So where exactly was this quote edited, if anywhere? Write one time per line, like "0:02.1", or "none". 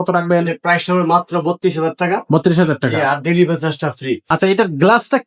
0:04.2